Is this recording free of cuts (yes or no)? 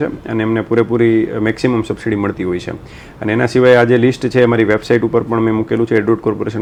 yes